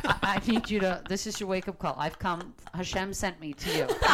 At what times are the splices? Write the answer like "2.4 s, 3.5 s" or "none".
none